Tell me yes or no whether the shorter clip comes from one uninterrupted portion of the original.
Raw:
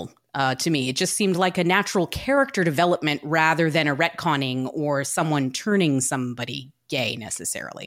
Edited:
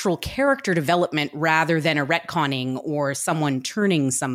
yes